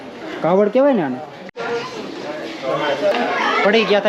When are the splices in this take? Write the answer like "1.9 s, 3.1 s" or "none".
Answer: 1.5 s, 3.1 s